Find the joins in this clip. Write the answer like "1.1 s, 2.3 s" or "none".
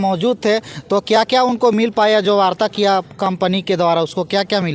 none